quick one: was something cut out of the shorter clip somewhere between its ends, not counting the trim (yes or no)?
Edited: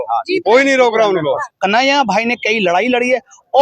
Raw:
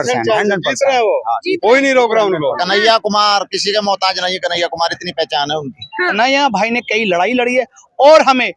yes